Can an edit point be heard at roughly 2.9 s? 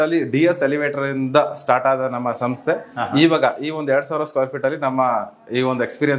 no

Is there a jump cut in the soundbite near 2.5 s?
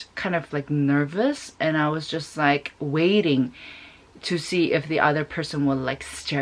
no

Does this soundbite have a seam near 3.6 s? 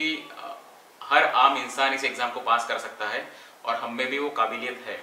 no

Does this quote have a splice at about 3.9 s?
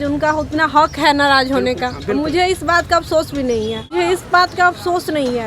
yes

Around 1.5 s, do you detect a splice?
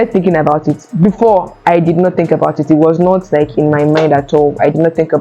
no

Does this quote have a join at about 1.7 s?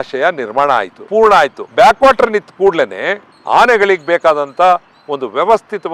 no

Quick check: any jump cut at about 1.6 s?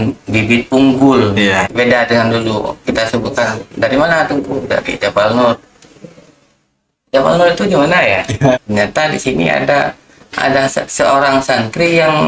yes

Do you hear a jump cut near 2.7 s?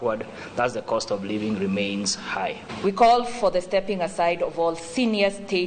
yes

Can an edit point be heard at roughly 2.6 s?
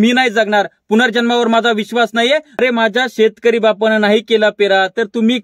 yes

